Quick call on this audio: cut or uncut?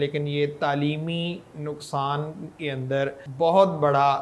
cut